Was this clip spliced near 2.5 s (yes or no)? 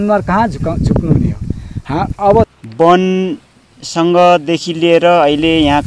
yes